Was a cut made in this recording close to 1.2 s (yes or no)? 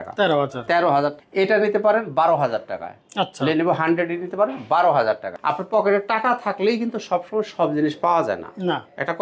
yes